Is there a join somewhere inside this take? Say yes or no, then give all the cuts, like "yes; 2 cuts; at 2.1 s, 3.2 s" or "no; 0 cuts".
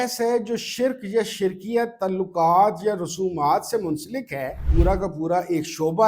yes; 1 cut; at 4.6 s